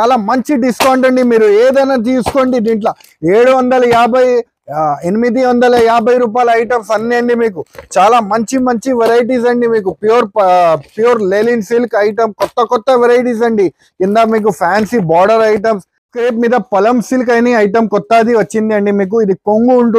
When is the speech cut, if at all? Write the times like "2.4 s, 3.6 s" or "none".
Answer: 15.9 s